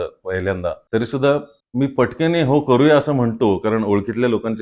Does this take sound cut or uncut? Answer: cut